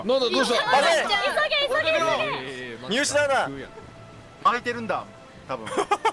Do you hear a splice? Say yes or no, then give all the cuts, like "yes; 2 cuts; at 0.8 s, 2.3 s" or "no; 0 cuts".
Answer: no; 0 cuts